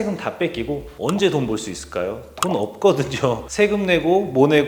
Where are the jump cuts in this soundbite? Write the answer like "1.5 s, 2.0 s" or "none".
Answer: 0.9 s, 3.5 s